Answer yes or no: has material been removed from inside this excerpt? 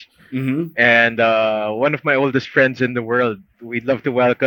yes